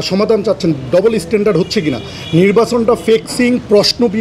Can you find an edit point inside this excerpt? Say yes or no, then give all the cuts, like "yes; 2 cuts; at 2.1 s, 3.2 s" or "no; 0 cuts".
no; 0 cuts